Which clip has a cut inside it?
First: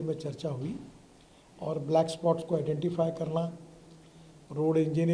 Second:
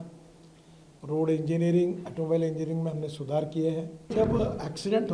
second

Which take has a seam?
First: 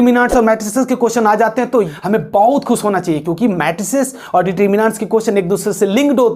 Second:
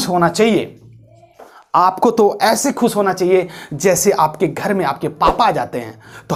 first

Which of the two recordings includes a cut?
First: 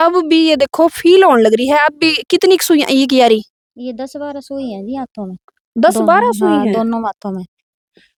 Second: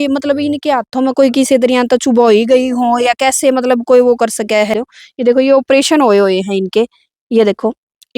second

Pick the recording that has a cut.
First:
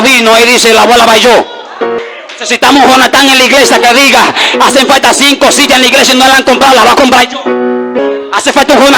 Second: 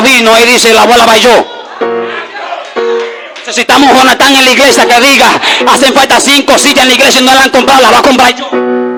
first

